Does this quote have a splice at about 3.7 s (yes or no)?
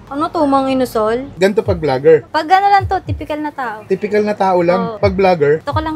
no